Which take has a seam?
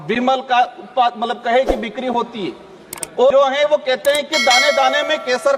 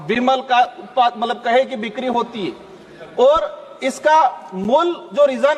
first; 1 cut; at 3.3 s

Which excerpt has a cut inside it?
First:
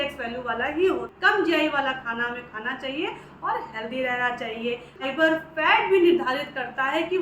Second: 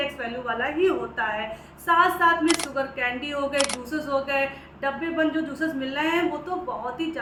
first; 2 cuts; at 1.1 s, 5.0 s

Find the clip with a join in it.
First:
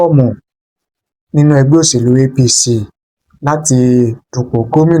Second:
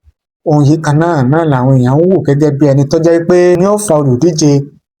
second; 1 cut; at 3.6 s

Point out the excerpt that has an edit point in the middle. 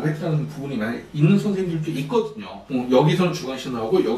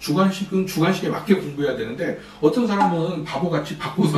first; 1 cut; at 2.5 s

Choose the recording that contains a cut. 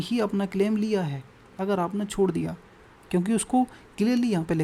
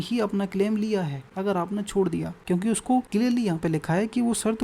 second; 3 cuts; at 1.2 s, 2.3 s, 3.1 s

